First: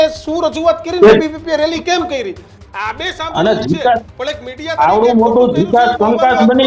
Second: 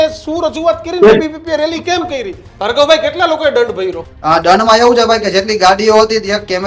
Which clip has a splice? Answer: second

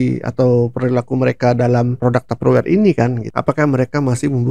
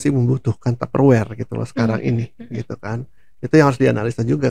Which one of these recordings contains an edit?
first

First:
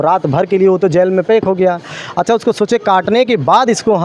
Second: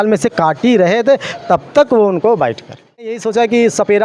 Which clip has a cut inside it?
second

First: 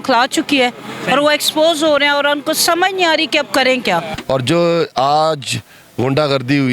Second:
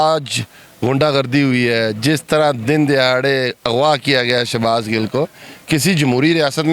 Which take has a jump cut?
first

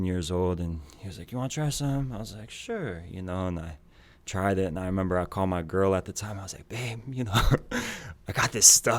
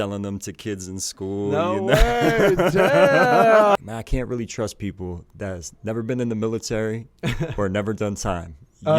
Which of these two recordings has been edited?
second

